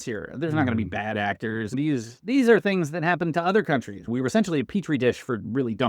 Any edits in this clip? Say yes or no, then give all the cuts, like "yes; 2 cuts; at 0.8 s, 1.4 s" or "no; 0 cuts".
yes; 2 cuts; at 1.7 s, 4.1 s